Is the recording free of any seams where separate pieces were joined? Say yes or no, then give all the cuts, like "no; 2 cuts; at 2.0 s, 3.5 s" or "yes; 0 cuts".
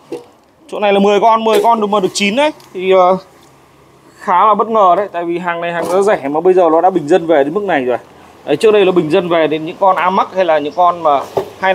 yes; 0 cuts